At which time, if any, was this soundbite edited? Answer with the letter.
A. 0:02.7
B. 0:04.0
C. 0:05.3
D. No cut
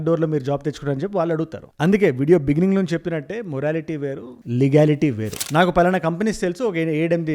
C